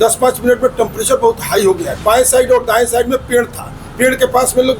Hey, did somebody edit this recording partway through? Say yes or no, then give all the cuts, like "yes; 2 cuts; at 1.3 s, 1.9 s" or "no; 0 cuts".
yes; 1 cut; at 1.9 s